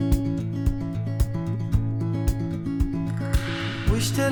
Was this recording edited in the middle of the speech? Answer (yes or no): no